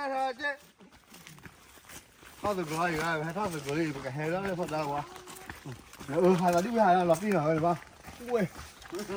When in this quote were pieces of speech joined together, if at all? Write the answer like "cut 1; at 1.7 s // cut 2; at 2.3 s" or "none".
none